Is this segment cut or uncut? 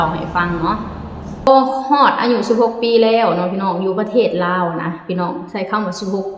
cut